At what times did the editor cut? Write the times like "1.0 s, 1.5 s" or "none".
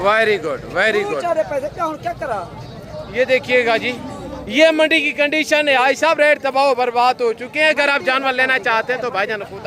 none